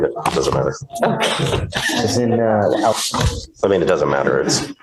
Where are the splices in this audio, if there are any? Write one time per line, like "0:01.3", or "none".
none